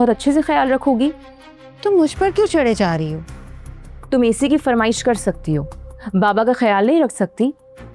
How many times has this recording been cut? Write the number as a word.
zero